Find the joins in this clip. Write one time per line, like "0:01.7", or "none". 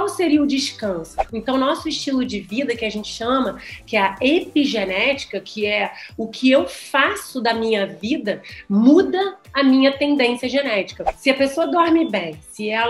0:01.2